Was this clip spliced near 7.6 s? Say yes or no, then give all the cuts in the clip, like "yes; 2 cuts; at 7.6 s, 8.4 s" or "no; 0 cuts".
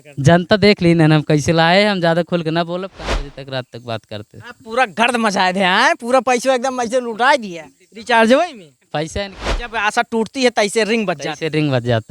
no; 2 cuts; at 3.0 s, 9.2 s